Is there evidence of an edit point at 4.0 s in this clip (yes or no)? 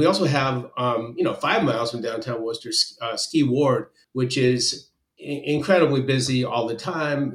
yes